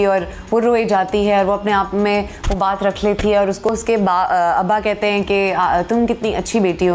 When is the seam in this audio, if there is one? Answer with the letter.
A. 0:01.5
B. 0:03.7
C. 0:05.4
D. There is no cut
B